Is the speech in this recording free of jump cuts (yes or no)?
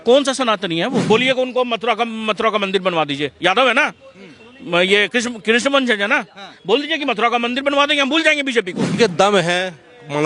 no